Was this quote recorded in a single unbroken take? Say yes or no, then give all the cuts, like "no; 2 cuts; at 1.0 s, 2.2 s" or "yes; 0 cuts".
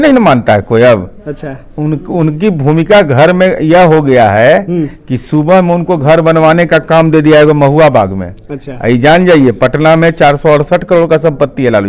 yes; 0 cuts